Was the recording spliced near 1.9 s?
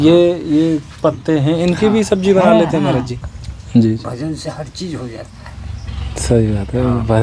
no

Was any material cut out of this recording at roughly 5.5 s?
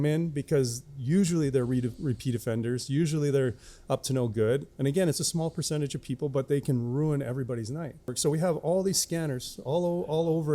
no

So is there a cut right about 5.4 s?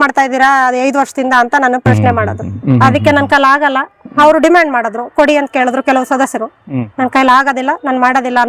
no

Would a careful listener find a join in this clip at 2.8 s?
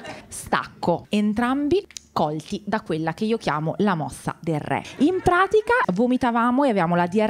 no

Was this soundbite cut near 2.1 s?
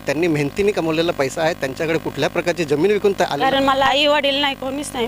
no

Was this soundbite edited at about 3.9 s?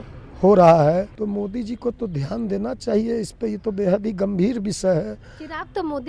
no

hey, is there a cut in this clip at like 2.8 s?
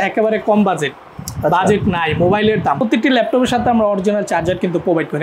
yes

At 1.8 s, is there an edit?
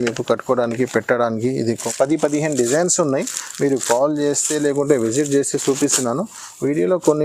yes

